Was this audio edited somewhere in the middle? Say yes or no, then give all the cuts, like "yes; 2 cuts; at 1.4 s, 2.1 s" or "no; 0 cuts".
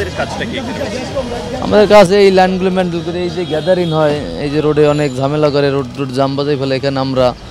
no; 0 cuts